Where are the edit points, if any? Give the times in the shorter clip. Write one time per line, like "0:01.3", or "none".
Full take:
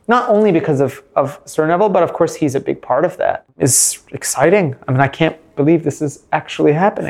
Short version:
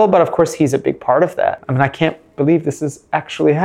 0:01.6